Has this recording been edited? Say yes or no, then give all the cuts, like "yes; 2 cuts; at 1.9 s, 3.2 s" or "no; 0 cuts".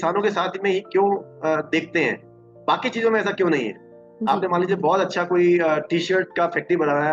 no; 0 cuts